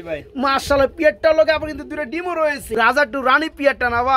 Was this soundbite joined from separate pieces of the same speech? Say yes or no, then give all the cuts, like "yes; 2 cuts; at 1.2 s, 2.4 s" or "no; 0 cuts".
yes; 1 cut; at 2.9 s